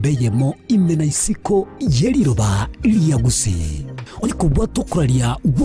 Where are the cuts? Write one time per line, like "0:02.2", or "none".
0:04.3